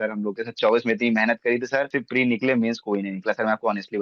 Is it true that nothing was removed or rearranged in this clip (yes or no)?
no